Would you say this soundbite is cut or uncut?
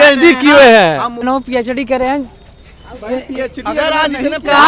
cut